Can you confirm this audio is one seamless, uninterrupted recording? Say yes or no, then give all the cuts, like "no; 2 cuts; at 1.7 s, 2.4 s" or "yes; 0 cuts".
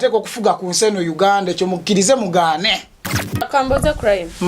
no; 1 cut; at 3.5 s